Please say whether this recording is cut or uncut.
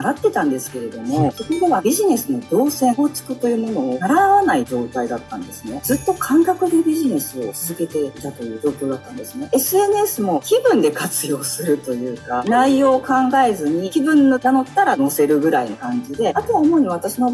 uncut